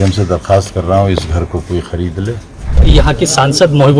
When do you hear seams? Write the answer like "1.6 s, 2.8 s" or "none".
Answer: 2.8 s